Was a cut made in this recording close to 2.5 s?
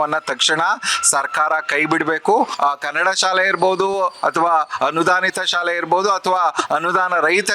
yes; 1 cut; at 2.5 s

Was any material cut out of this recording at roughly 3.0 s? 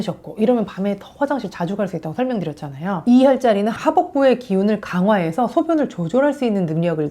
yes; 1 cut; at 3.0 s

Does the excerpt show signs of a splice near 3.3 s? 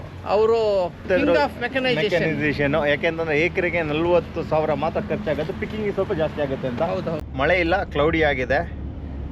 no; 2 cuts; at 1.1 s, 7.2 s

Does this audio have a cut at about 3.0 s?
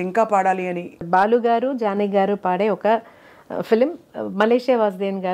no; 1 cut; at 1.0 s

